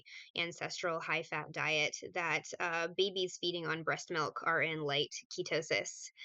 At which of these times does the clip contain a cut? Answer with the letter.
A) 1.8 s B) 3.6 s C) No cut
C